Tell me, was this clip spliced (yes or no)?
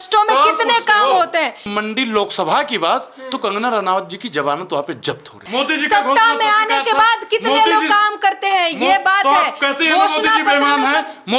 yes